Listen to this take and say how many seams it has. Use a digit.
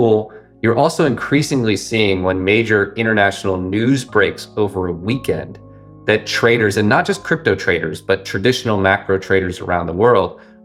0